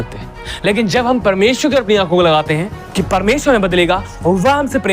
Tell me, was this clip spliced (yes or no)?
yes